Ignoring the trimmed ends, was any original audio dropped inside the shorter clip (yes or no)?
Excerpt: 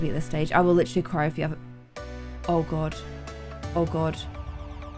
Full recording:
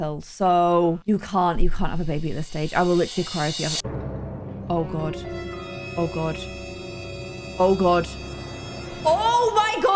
no